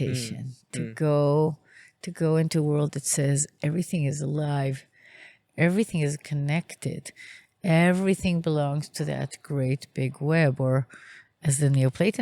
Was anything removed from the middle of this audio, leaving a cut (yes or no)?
yes